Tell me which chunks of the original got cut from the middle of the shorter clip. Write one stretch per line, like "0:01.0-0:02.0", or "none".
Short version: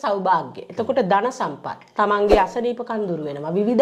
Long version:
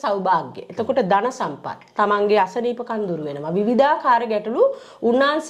none